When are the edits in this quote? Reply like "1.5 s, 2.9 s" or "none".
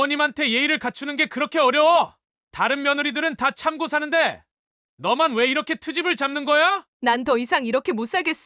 6.9 s